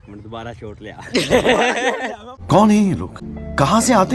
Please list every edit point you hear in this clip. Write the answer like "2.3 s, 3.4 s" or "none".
none